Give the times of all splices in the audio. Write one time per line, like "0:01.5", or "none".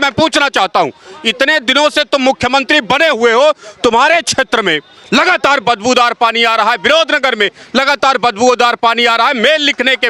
none